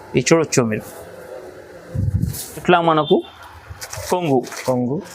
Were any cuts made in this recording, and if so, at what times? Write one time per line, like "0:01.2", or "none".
0:02.6

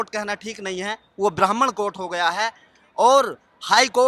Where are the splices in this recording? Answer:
none

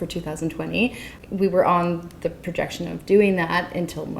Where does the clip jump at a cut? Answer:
0:01.1

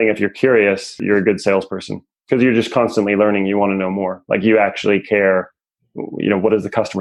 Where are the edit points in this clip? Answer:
0:01.0

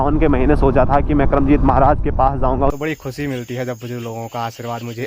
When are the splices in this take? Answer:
0:02.7

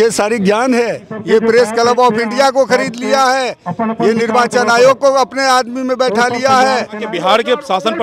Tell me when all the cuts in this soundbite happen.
0:01.1
0:07.1

